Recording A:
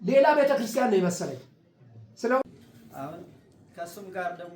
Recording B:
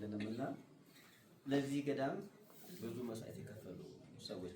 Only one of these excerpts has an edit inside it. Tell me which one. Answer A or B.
A